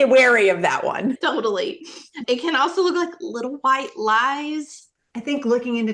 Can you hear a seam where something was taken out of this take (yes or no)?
yes